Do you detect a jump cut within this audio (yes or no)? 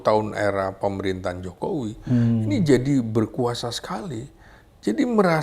no